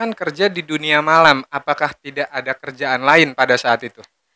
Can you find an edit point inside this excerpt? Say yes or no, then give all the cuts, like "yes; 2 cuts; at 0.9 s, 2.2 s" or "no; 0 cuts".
no; 0 cuts